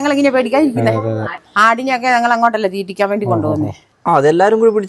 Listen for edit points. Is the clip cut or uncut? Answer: cut